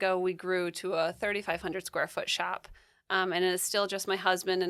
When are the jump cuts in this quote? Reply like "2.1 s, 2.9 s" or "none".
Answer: none